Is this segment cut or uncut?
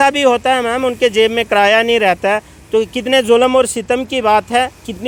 uncut